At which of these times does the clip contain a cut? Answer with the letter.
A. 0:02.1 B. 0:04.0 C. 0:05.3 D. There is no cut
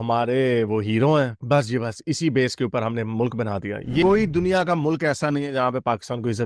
B